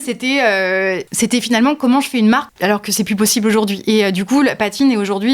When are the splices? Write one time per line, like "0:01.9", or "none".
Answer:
0:01.1
0:02.5